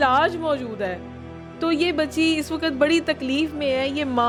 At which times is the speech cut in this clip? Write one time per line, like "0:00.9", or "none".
none